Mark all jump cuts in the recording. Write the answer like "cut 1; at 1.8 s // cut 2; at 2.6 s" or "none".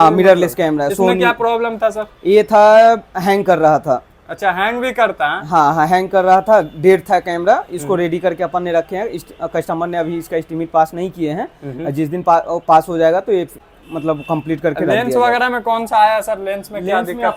none